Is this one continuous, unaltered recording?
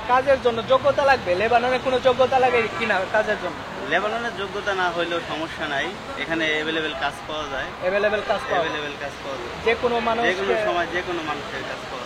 yes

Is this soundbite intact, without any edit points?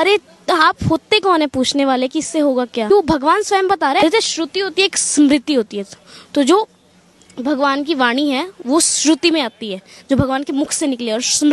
no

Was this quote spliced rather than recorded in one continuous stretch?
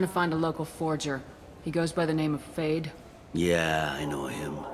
no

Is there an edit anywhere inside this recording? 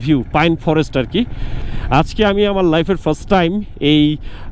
yes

